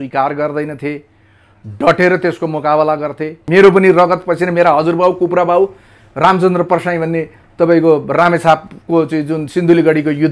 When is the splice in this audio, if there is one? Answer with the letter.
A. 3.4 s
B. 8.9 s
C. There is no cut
A